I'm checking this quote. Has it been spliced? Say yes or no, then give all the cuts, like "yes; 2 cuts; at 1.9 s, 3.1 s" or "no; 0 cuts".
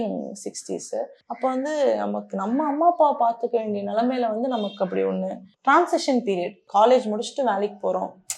yes; 1 cut; at 1.2 s